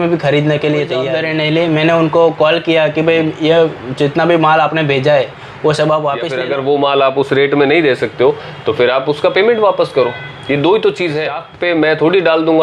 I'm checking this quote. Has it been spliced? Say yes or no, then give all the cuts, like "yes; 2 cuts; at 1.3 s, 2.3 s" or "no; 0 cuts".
yes; 3 cuts; at 1.1 s, 6.3 s, 11.5 s